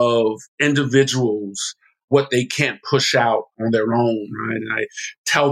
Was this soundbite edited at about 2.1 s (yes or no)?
yes